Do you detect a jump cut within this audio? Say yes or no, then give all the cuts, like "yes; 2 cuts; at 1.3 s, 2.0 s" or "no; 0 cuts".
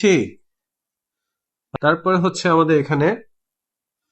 yes; 1 cut; at 1.6 s